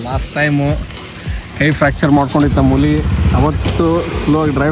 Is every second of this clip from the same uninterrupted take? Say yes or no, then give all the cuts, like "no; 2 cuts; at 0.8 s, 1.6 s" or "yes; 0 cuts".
yes; 0 cuts